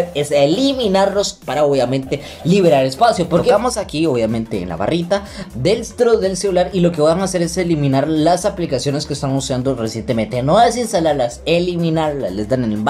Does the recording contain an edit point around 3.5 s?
yes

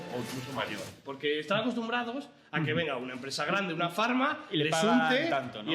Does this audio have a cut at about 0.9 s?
yes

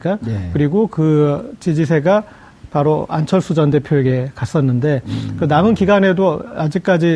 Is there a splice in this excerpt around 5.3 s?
yes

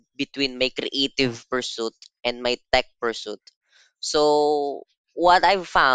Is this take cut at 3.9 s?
no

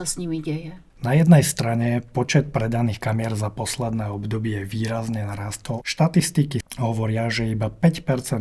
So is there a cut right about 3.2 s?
no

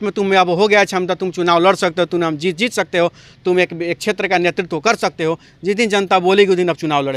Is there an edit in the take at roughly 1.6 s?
no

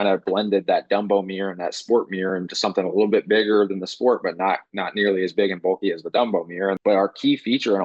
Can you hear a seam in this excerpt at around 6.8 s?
yes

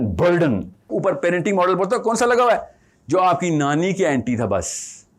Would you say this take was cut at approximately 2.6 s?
no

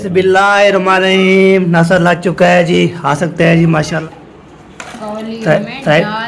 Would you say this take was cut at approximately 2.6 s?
no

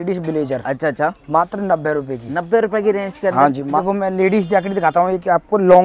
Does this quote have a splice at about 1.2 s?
no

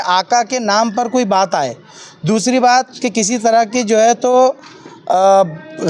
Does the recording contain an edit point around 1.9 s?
no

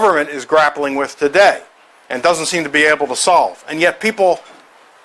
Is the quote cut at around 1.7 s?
no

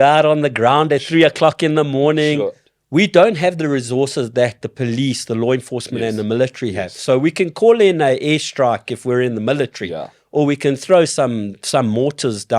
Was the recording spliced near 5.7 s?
no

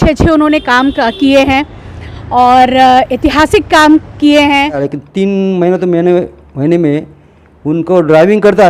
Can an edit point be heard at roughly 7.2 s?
no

